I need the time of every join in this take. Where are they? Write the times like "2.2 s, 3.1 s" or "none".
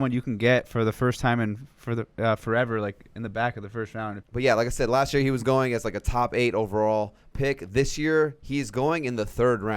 4.2 s